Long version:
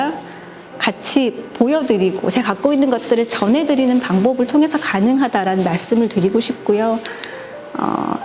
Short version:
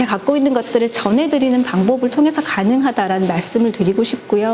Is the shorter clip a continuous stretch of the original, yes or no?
yes